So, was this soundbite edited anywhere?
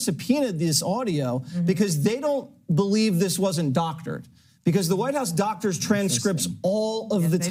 no; 0 cuts

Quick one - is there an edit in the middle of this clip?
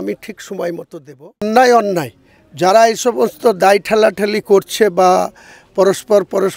yes; 1 cut; at 1.4 s

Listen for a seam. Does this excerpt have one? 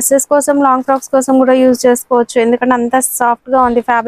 no; 0 cuts

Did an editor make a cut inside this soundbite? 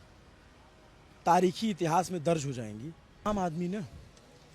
yes; 1 cut; at 3.2 s

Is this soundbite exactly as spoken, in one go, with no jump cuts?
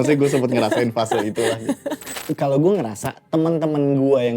no; 1 cut; at 2.1 s

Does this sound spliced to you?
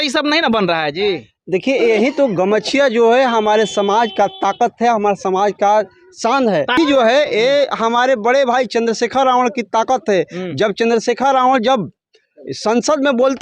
yes; 1 cut; at 6.7 s

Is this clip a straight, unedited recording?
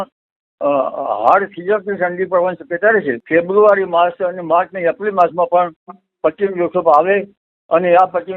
no; 1 cut; at 3.2 s

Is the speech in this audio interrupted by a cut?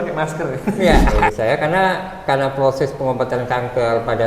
yes; 1 cut; at 1.3 s

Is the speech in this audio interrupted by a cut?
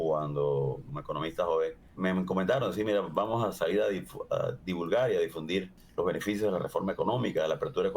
yes; 3 cuts; at 0.9 s, 1.8 s, 5.8 s

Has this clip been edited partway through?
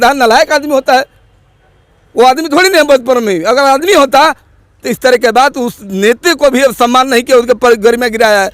no; 0 cuts

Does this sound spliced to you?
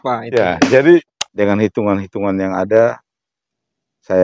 yes; 1 cut; at 1.2 s

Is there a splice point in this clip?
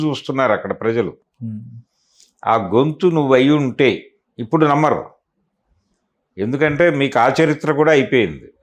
no; 0 cuts

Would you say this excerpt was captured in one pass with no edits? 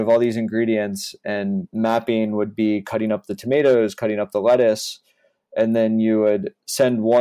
no; 1 cut; at 1.7 s

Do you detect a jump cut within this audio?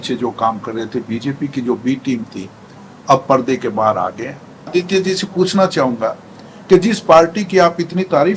yes; 1 cut; at 4.7 s

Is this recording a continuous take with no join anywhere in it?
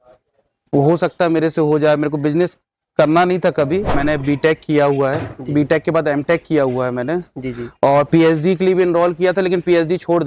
no; 1 cut; at 3.9 s

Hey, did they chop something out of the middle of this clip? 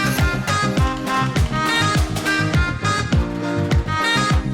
no; 0 cuts

